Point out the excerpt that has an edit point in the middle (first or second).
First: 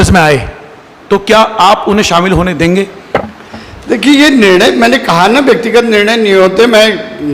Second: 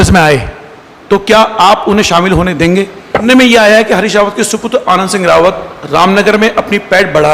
second